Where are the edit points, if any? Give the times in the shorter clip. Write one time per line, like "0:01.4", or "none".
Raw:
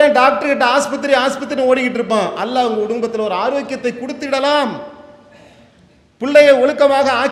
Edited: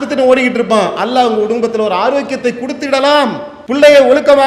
0:03.5